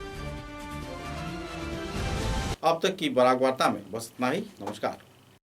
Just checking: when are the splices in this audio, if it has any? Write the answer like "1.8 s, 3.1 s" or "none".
none